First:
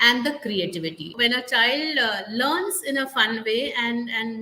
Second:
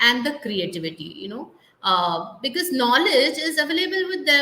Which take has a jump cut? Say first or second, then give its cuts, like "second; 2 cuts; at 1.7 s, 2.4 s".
first; 1 cut; at 1.0 s